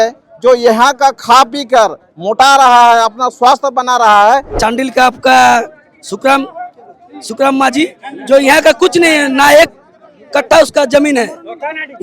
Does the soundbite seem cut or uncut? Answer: cut